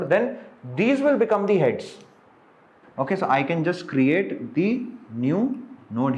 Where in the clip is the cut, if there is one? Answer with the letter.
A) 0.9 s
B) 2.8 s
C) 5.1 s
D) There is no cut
B